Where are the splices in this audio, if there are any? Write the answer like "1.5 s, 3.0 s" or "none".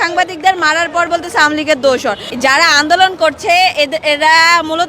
2.2 s